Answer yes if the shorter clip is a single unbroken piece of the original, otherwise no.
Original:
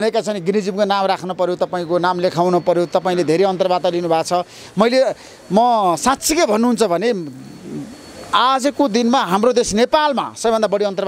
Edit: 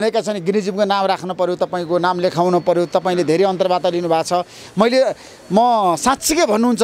yes